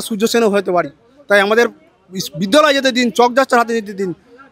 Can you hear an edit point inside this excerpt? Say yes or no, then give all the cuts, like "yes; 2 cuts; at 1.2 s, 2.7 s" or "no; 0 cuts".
no; 0 cuts